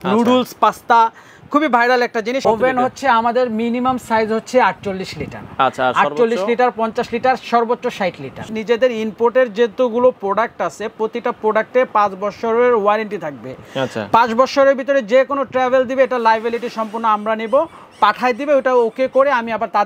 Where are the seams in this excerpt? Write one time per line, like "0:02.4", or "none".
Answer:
0:02.4
0:08.5